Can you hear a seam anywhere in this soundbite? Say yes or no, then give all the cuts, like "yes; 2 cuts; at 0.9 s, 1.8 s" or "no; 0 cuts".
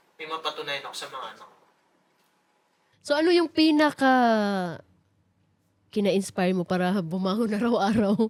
no; 0 cuts